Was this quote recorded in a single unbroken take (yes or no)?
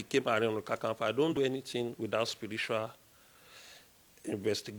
no